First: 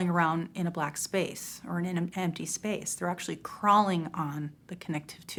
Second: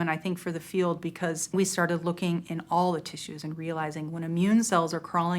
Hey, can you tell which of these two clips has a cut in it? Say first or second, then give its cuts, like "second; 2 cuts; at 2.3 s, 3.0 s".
second; 1 cut; at 1.5 s